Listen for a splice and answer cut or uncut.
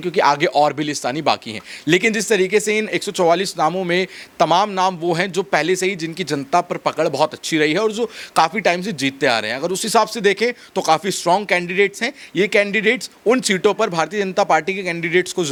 uncut